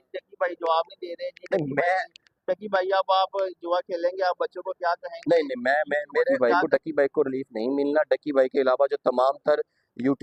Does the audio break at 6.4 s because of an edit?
yes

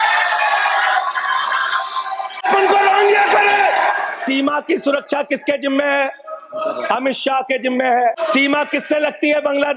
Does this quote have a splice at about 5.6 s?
no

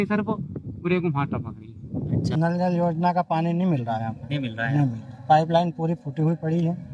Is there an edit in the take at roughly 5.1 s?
no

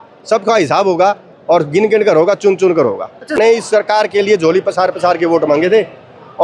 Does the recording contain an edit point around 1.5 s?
no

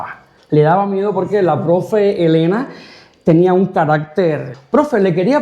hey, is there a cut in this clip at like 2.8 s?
no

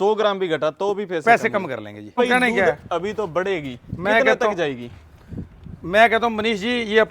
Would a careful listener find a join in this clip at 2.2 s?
yes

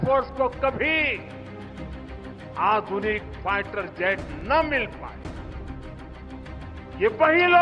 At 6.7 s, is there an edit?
yes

